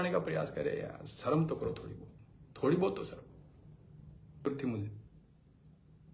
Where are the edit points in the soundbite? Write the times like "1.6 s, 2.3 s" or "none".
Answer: 4.5 s